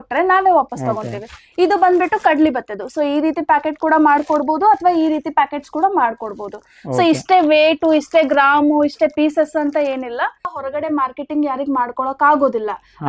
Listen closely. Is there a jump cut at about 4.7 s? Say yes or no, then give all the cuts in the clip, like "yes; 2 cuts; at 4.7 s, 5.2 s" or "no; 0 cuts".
no; 1 cut; at 10.5 s